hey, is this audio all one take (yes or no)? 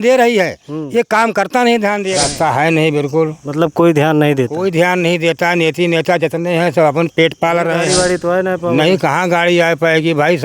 no